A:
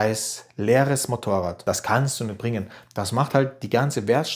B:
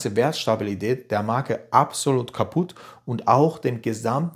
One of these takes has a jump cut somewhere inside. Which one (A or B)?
A